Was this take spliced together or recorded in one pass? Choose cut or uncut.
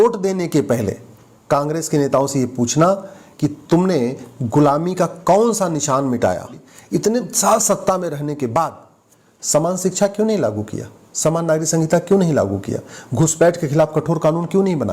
cut